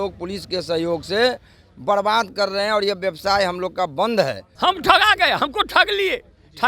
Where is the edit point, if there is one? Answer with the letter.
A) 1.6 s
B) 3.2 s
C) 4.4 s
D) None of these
C